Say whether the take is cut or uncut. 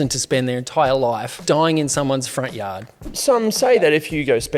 cut